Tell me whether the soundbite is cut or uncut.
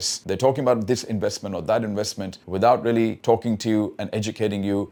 uncut